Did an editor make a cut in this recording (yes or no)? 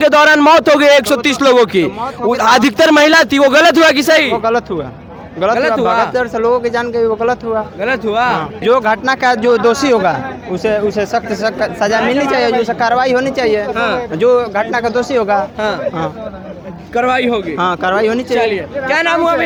no